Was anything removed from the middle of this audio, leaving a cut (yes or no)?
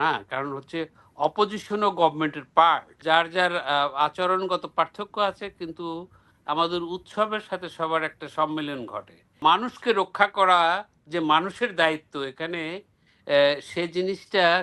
yes